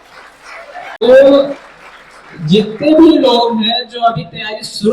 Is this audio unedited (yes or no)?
no